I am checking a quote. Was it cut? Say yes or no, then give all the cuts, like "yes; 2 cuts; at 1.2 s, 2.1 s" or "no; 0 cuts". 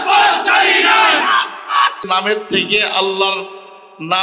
yes; 1 cut; at 2.0 s